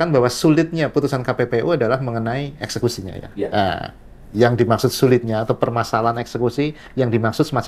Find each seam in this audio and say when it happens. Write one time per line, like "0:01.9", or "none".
none